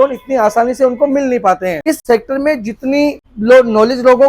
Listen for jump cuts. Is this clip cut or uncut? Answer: cut